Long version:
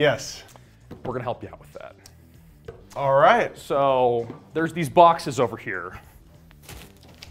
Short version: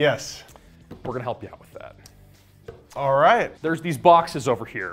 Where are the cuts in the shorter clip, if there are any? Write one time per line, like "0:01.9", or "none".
0:03.5